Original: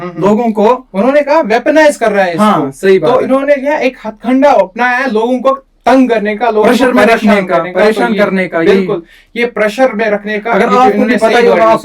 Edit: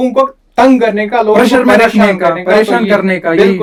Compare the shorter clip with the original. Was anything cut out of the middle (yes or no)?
no